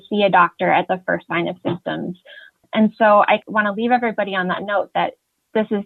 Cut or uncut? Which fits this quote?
uncut